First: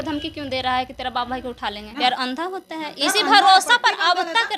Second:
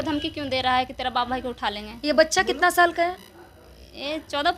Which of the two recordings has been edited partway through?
first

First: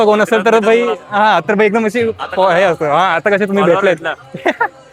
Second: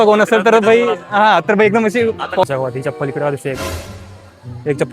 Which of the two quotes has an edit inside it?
second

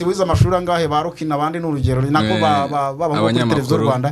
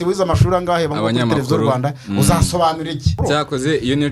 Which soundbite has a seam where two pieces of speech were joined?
second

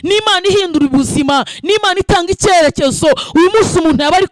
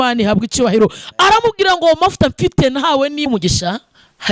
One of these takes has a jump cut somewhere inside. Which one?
second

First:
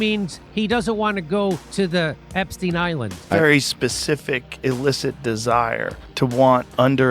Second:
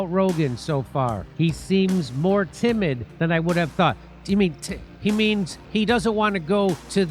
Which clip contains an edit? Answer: first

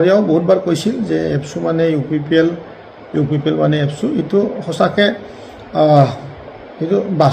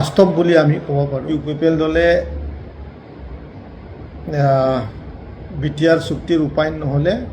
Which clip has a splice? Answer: second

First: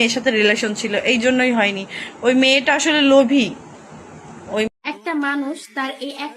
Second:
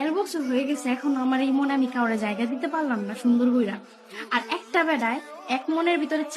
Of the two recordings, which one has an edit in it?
first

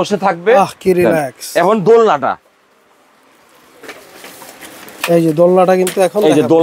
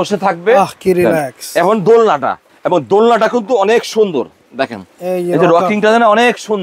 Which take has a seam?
second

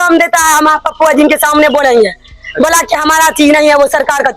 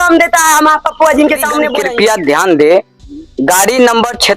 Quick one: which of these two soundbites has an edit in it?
second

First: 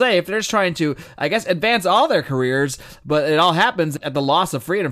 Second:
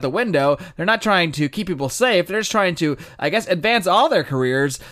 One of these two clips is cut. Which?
first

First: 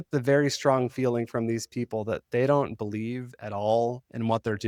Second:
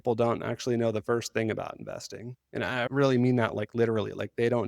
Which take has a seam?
second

